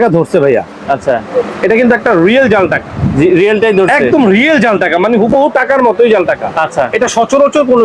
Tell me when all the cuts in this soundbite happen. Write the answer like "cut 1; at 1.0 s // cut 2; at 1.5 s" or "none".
none